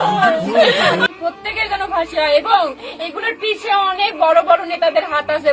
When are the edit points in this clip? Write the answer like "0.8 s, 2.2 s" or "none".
1.0 s